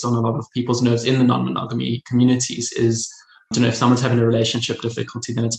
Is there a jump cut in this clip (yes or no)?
no